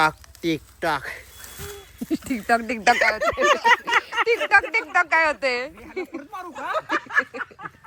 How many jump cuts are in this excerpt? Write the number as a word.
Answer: zero